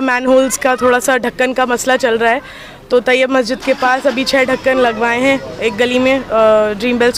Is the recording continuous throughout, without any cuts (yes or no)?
yes